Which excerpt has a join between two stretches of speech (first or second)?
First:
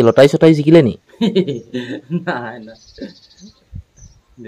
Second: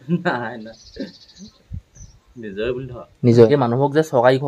second